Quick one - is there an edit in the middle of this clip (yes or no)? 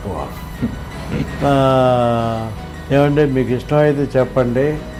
no